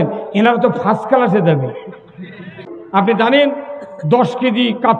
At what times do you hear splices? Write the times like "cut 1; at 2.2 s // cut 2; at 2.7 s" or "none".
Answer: cut 1; at 2.8 s